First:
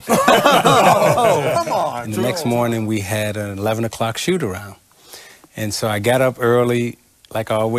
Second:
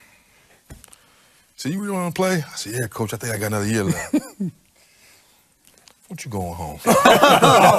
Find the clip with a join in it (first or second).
first